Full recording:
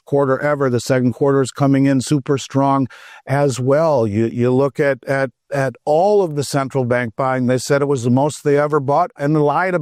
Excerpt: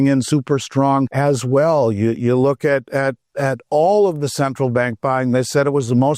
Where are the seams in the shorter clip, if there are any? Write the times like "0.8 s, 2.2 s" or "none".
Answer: 1.1 s